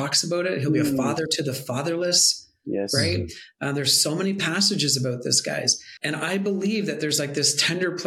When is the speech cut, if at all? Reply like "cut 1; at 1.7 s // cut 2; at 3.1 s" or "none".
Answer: cut 1; at 5.9 s